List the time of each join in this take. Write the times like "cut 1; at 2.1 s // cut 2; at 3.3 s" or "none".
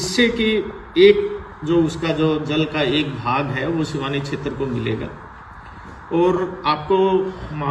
none